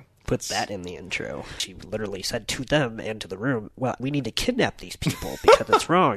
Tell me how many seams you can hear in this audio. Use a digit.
2